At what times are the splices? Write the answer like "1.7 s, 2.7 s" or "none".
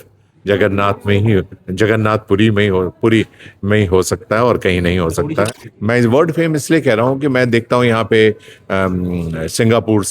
5.5 s